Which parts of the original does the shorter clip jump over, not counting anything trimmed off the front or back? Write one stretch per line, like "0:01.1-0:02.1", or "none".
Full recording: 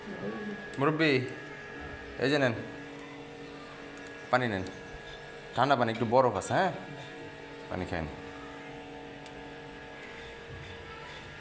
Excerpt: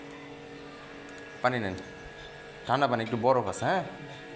none